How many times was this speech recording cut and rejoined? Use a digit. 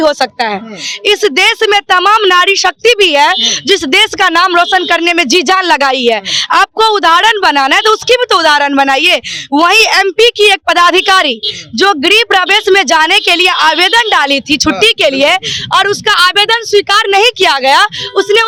0